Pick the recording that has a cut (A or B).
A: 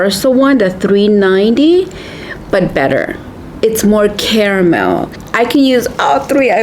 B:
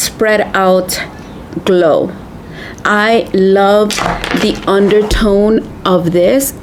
A